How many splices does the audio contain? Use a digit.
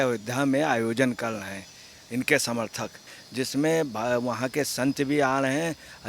1